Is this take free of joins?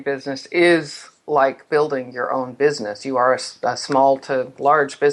yes; 0 cuts

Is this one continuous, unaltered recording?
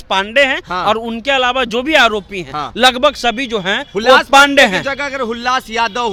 yes; 0 cuts

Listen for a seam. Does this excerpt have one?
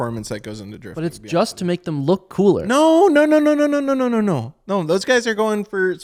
no; 0 cuts

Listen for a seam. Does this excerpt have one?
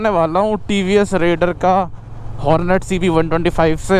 no; 0 cuts

